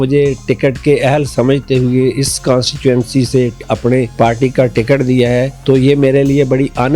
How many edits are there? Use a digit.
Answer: 2